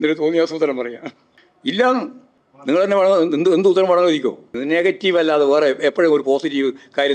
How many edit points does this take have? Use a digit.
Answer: 1